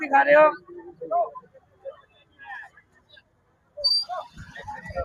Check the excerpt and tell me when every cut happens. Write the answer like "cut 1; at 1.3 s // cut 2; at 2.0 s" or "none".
none